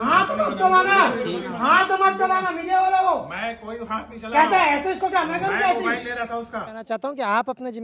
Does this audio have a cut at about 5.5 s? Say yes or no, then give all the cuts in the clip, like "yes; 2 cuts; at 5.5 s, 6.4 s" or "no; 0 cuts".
no; 1 cut; at 6.7 s